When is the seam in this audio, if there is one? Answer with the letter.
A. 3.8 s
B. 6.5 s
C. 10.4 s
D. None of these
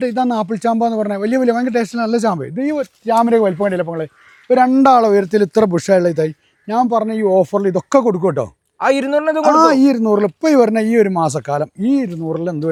D